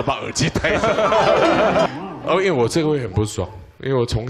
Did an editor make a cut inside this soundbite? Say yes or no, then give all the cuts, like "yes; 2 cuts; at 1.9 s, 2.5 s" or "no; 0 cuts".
yes; 1 cut; at 1.9 s